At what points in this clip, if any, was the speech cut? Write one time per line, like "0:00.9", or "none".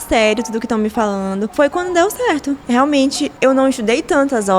0:01.5
0:02.6
0:03.3